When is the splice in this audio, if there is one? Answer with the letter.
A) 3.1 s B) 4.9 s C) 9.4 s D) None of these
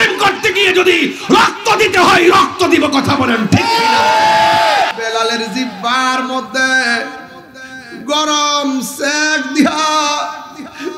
B